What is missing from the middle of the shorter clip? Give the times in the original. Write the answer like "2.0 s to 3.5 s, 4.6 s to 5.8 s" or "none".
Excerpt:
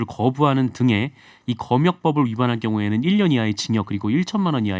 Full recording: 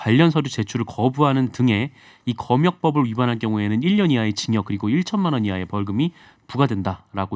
none